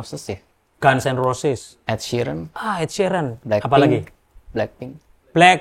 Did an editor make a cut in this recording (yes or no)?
yes